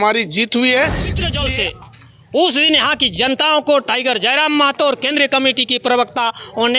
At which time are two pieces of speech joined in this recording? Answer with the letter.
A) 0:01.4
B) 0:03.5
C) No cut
A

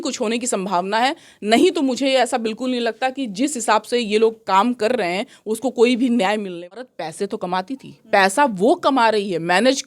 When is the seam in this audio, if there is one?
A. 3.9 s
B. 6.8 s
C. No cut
B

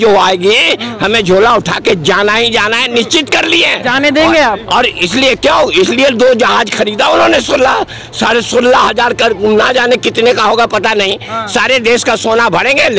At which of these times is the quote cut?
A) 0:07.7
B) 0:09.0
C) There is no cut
C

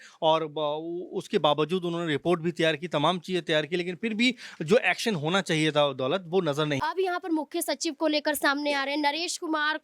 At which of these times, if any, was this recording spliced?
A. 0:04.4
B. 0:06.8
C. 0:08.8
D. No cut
B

